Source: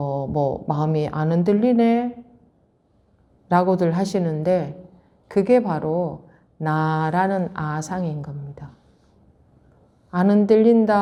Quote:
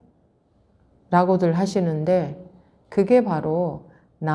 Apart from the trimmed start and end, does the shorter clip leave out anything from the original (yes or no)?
no